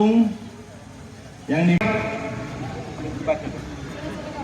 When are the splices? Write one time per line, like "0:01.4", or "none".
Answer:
0:01.8